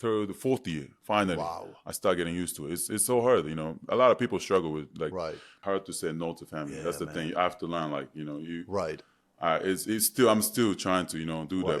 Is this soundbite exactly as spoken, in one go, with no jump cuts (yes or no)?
no